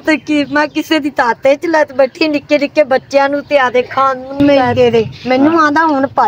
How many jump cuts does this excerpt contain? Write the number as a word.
one